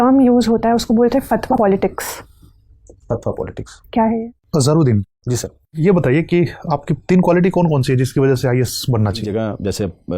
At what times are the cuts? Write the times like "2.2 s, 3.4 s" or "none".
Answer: 1.5 s, 4.2 s, 9.2 s

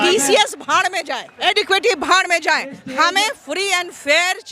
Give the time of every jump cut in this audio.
1.4 s

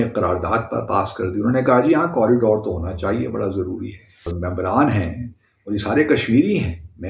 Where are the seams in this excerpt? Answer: 4.3 s

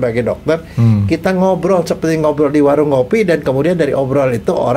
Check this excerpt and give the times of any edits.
none

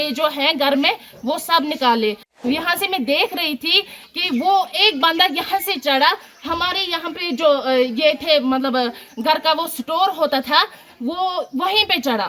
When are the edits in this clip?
2.3 s

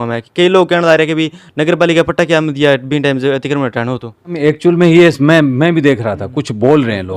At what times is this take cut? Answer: 4.4 s

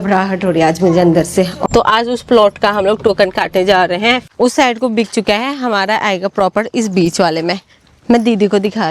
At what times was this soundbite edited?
1.6 s, 4.2 s

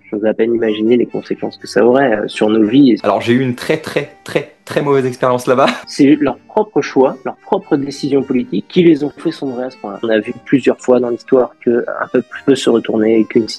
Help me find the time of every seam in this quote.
3.0 s, 5.8 s, 10.0 s

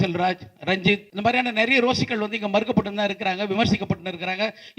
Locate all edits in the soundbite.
1.1 s

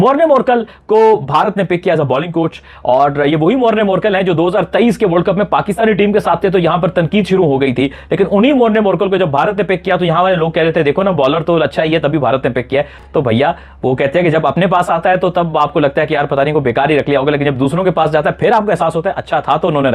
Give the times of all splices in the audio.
none

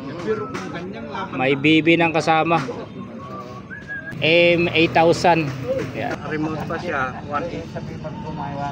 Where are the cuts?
4.1 s, 6.2 s

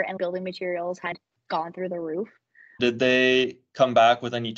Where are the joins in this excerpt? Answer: 1.1 s, 2.8 s

